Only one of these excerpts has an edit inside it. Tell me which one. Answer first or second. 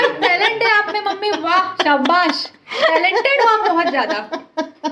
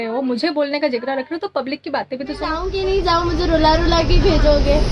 second